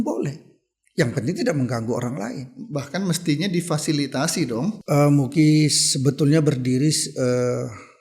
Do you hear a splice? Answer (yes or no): yes